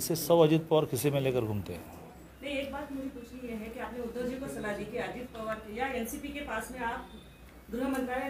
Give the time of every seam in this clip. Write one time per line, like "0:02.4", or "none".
0:02.3